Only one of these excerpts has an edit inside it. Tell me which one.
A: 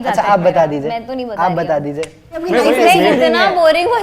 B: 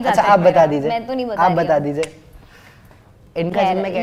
A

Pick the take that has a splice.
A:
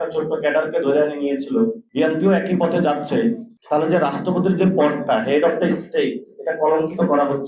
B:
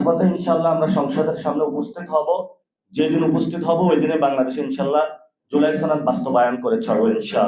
A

